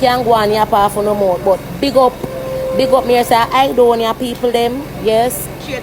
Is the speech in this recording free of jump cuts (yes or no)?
yes